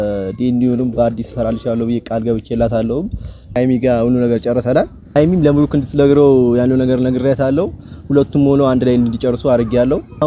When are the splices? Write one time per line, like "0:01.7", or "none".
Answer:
0:03.6